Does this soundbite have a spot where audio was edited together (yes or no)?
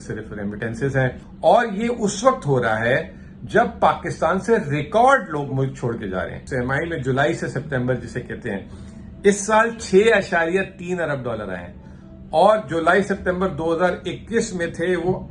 yes